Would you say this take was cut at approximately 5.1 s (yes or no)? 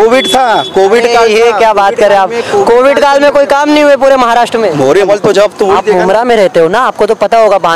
yes